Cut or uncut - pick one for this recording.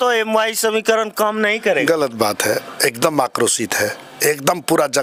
uncut